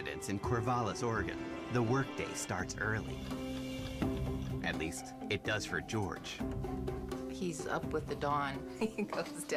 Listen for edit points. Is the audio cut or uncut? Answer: cut